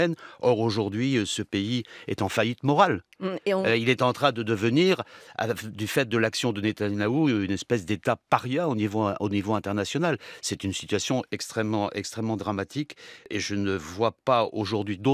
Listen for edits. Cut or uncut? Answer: cut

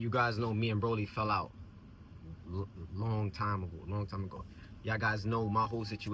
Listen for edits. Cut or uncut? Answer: uncut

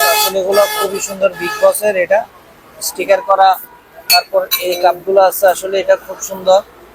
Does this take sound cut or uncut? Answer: uncut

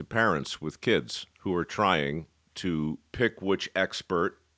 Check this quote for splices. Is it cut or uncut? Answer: cut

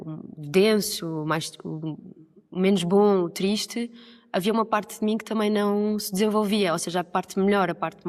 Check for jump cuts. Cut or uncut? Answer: uncut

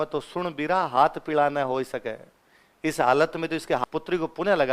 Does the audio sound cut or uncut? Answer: cut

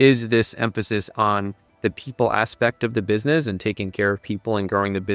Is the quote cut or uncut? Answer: cut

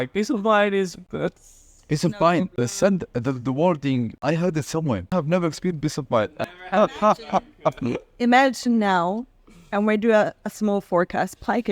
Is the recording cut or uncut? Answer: cut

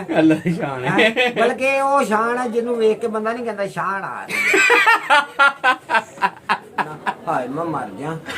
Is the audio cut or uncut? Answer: cut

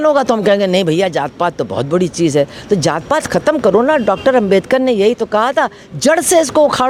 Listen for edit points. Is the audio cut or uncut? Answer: uncut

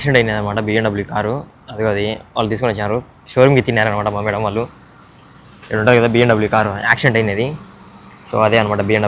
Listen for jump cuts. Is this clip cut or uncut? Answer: uncut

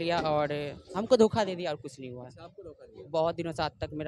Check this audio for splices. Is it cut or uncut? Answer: uncut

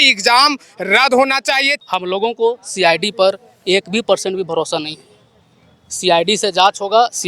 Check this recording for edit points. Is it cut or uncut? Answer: cut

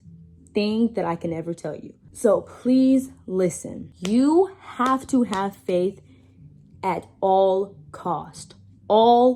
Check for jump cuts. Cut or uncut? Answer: uncut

